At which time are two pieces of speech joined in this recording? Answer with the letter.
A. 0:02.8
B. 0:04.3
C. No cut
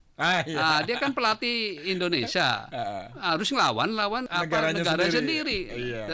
B